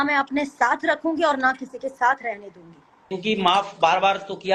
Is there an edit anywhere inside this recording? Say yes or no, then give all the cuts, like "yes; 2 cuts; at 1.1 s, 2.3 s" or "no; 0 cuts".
yes; 1 cut; at 3.1 s